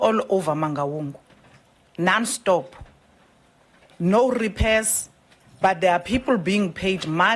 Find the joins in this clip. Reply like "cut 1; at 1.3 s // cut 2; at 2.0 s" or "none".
none